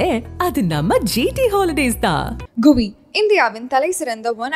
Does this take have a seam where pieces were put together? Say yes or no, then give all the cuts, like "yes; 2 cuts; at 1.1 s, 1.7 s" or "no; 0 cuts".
no; 0 cuts